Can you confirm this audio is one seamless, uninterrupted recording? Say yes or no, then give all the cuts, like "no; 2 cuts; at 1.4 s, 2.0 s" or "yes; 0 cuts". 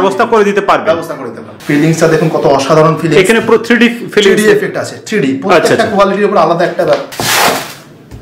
no; 1 cut; at 1.5 s